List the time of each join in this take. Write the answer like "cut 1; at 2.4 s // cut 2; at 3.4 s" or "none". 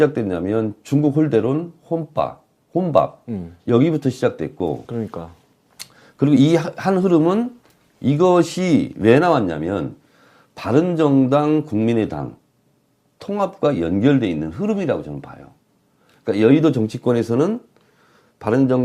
cut 1; at 11.7 s